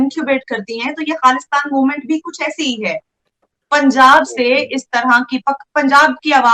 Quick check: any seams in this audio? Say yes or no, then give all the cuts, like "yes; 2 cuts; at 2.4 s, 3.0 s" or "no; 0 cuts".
no; 0 cuts